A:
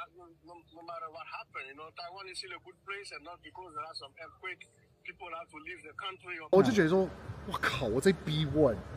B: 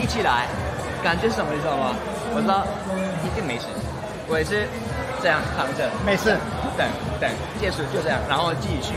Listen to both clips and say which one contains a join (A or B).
A